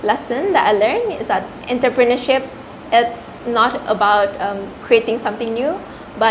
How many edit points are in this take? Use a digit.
0